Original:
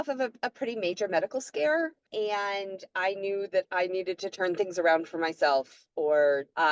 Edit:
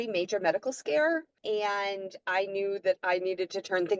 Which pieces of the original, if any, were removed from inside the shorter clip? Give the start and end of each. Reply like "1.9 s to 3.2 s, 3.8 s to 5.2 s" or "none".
none